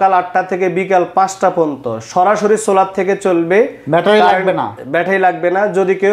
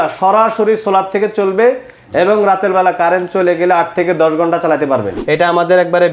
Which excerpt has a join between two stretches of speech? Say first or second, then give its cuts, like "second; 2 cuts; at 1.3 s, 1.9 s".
second; 1 cut; at 5.2 s